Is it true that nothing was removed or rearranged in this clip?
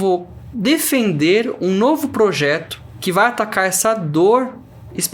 yes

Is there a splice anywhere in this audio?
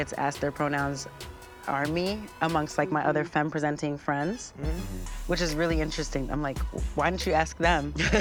no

